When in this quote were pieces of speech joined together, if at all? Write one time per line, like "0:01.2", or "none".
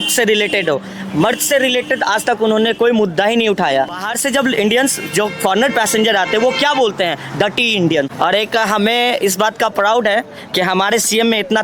0:04.1
0:08.1